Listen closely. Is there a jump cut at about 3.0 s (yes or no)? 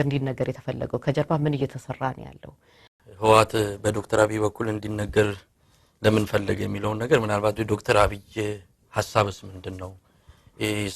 yes